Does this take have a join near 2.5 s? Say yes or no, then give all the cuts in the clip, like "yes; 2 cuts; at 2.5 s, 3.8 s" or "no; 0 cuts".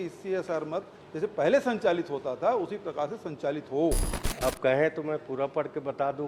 no; 1 cut; at 4.1 s